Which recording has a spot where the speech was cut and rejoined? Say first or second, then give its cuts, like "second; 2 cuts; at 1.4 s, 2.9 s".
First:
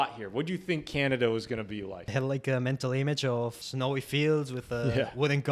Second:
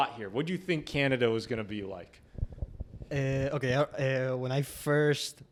first; 2 cuts; at 2.1 s, 3.6 s